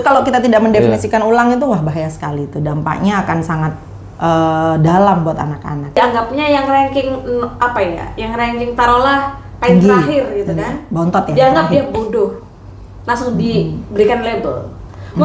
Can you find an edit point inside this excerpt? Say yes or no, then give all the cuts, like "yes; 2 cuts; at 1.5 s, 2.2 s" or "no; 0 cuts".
yes; 1 cut; at 6.0 s